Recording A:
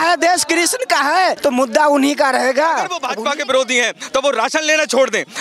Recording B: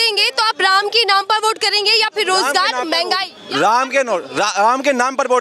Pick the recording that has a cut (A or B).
A